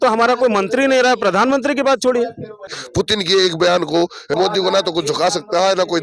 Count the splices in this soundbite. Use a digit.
2